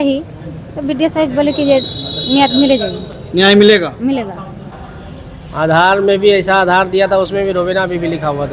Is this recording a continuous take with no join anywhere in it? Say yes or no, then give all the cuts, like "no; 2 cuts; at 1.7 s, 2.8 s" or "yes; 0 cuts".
no; 1 cut; at 4.9 s